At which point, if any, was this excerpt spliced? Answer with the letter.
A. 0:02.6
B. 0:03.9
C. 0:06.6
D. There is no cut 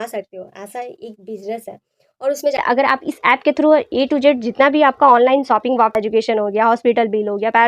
A